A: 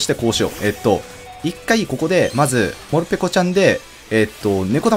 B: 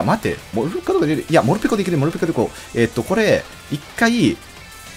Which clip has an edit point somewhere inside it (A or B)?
A